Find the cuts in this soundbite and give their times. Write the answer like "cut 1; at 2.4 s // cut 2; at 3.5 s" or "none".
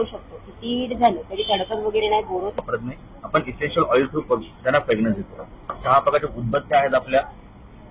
cut 1; at 2.6 s